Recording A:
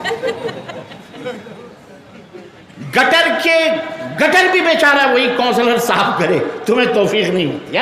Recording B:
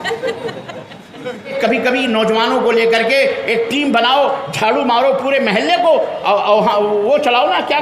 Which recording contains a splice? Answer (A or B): B